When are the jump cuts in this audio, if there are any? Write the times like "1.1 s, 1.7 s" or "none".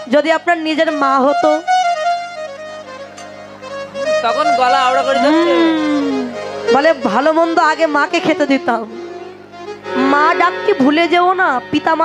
9.8 s